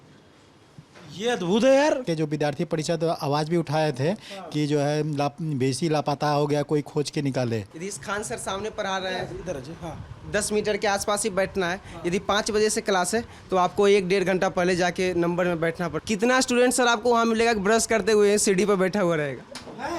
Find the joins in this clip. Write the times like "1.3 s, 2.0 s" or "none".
2.0 s, 7.8 s, 15.9 s